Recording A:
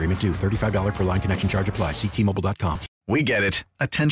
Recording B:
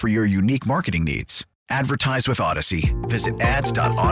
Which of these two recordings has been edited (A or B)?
A